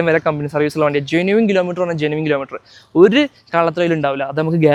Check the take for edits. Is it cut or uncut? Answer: uncut